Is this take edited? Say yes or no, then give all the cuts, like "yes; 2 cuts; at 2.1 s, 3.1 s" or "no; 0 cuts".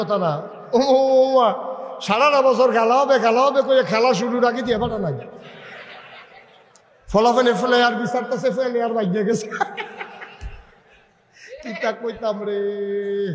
no; 0 cuts